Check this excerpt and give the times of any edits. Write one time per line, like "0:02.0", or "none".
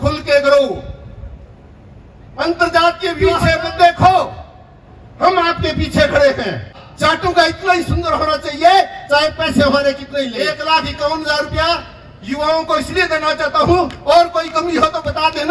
0:03.2
0:06.8
0:10.3